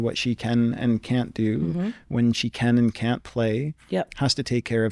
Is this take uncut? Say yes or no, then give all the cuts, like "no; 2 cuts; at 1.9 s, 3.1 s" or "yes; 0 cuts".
yes; 0 cuts